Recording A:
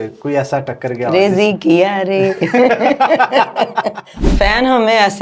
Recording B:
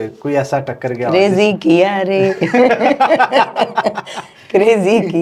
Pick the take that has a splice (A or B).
A